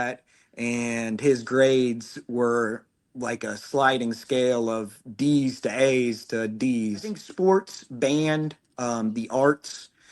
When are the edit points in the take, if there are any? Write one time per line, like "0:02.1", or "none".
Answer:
0:07.2